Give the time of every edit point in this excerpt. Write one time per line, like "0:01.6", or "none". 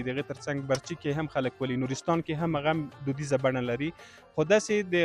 none

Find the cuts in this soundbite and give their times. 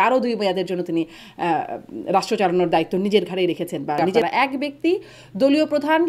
0:04.2

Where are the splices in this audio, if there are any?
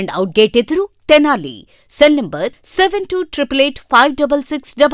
none

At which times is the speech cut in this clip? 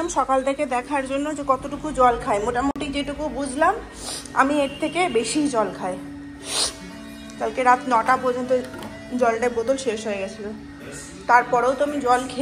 none

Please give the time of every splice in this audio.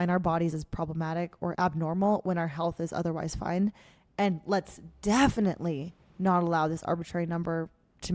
none

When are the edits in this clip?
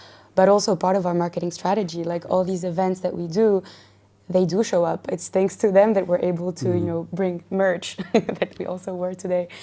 none

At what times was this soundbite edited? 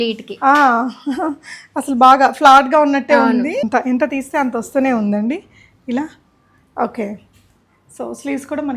0:03.6

